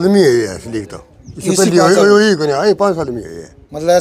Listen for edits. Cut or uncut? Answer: uncut